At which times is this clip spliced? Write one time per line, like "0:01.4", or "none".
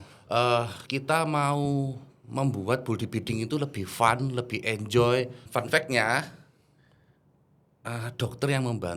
0:05.4